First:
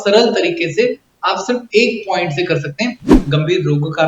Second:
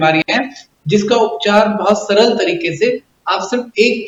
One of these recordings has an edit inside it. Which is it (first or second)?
first